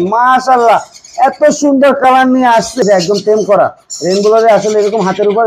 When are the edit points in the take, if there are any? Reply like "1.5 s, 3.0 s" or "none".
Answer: 2.8 s

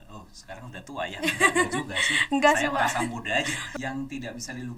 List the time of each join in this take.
3.6 s

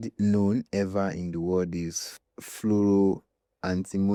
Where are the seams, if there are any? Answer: none

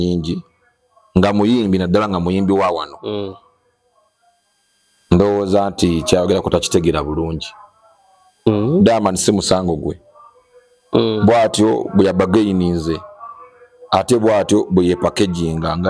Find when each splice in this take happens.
none

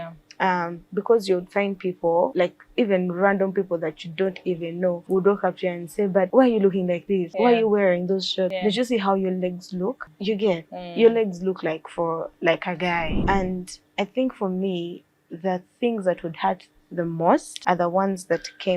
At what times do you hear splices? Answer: 2.3 s, 5.0 s, 6.3 s, 7.3 s, 8.6 s, 10.1 s, 13.1 s, 17.5 s

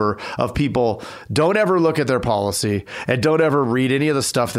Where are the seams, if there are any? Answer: none

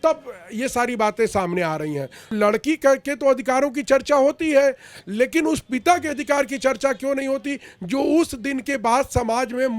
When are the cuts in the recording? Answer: 2.4 s

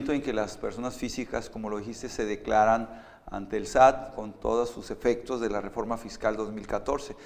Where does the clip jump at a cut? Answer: 5.2 s

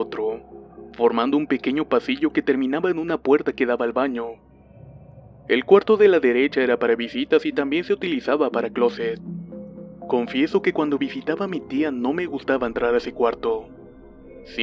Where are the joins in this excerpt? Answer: 6.9 s

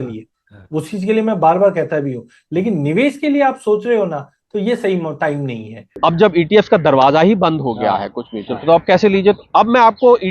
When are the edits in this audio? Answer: 5.8 s

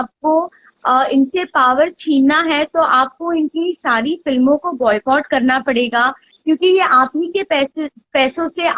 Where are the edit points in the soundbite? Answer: 6.3 s

